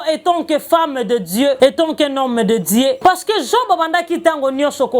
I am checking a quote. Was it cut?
yes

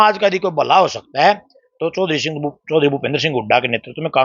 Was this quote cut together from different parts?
no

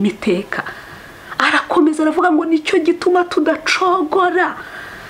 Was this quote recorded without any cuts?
yes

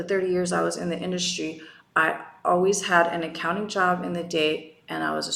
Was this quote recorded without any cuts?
yes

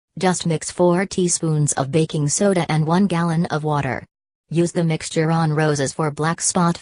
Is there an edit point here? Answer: yes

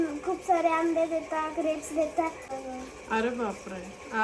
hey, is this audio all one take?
no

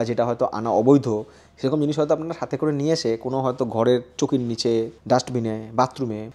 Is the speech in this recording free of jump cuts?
yes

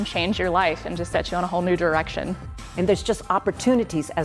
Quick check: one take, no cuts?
no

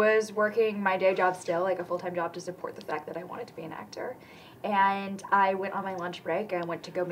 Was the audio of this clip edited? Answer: no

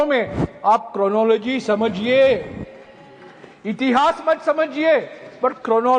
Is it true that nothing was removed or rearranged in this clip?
yes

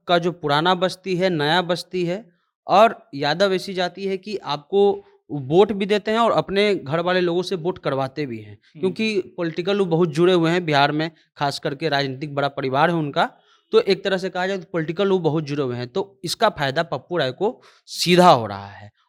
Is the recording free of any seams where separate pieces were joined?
yes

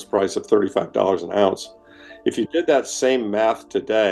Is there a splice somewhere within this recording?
no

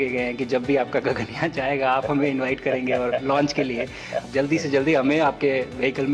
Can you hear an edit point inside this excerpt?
yes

